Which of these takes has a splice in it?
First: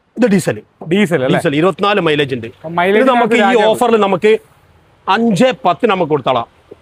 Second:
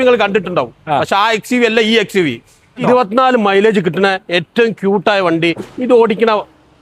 second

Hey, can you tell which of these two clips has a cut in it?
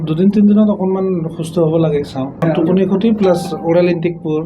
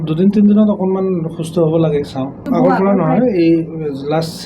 first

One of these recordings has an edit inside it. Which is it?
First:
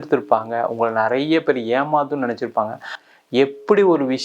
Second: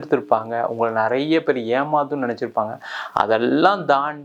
first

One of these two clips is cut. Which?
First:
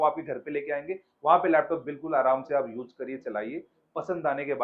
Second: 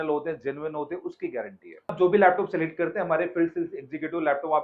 second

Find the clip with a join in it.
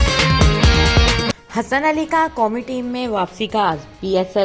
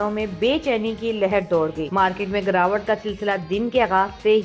first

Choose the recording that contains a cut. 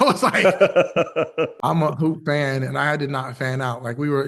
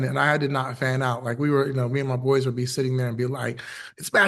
first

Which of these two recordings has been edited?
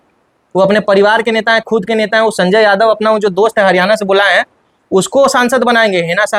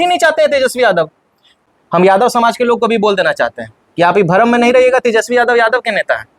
second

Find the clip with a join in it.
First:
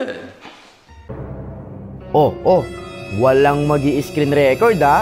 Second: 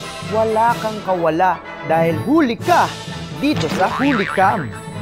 first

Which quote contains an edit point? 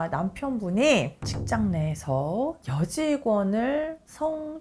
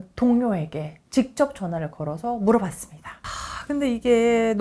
second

